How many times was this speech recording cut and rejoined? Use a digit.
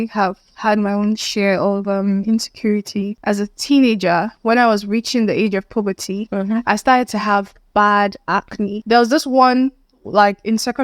2